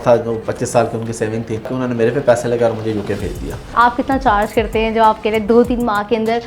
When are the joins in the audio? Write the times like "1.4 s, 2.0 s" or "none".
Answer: 1.7 s, 3.7 s